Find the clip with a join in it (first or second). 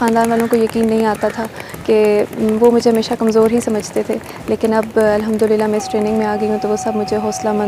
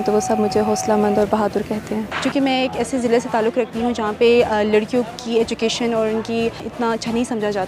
second